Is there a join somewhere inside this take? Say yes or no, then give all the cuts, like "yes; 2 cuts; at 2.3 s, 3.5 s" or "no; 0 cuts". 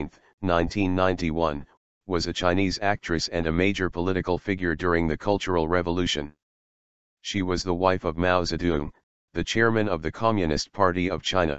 no; 0 cuts